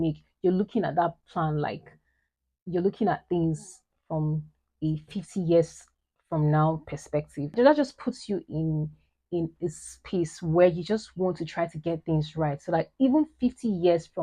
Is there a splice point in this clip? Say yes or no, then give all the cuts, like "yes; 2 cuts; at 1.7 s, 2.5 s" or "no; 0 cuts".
yes; 1 cut; at 7.5 s